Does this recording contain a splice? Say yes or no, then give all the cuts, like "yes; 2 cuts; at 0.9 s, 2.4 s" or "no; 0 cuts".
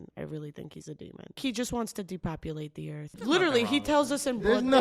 yes; 2 cuts; at 1.4 s, 3.2 s